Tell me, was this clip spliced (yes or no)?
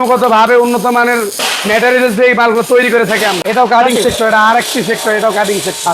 yes